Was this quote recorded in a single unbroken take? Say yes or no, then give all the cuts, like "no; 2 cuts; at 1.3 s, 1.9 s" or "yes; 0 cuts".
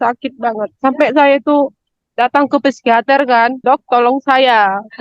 no; 1 cut; at 3.6 s